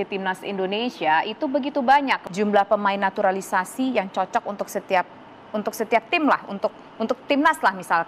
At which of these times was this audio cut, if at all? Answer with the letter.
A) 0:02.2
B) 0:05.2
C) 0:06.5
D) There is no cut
A